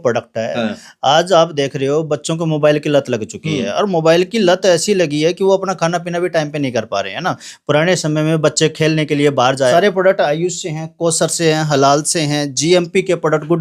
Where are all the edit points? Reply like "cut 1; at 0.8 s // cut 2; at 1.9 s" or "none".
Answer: cut 1; at 9.7 s